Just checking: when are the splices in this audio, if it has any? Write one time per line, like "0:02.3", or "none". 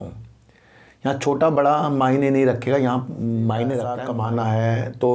0:04.0